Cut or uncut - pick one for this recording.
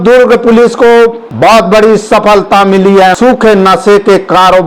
cut